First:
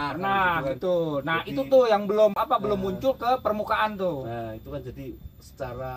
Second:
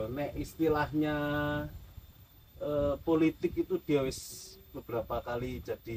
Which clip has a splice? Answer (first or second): first